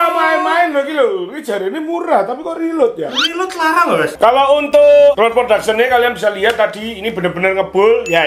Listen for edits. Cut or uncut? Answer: cut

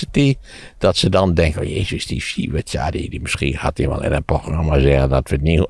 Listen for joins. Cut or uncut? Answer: uncut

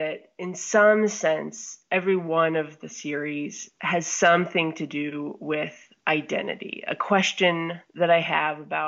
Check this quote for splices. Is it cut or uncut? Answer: uncut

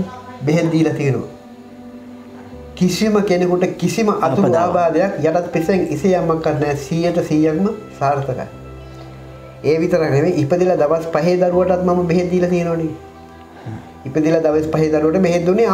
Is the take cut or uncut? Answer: uncut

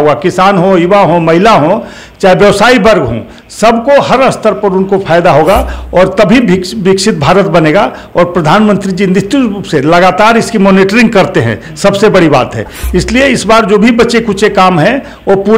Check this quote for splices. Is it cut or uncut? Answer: uncut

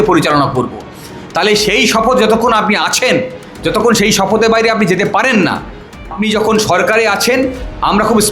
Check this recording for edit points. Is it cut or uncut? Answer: cut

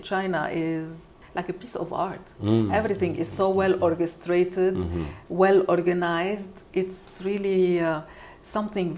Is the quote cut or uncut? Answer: cut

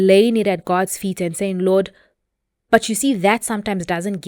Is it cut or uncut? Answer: uncut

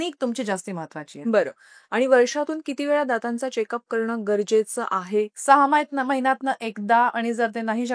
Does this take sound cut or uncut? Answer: uncut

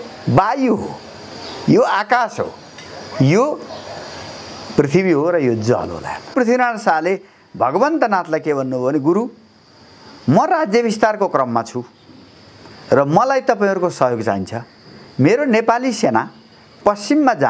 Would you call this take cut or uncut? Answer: cut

